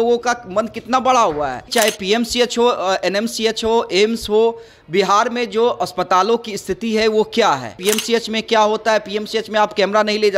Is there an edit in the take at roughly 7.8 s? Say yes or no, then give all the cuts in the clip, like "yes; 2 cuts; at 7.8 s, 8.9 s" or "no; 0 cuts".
yes; 2 cuts; at 1.6 s, 7.8 s